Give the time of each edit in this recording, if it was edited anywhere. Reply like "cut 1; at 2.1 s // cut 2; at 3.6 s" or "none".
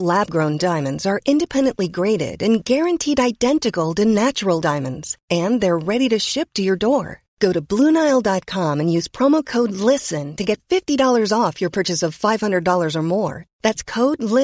none